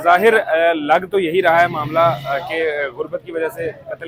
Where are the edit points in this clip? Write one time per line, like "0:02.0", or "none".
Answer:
none